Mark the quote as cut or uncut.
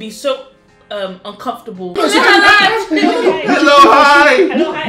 cut